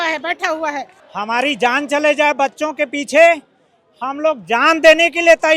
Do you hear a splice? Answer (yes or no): yes